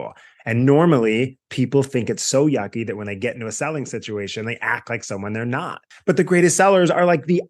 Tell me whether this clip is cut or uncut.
cut